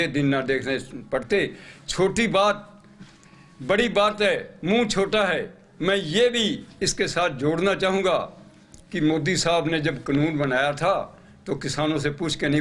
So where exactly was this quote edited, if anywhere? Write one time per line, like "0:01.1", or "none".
none